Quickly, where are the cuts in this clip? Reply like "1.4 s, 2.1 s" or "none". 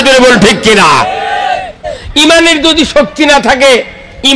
1.9 s